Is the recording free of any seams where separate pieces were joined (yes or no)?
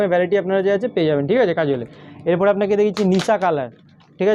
yes